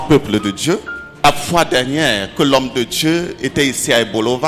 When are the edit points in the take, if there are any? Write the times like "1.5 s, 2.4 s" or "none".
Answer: 1.2 s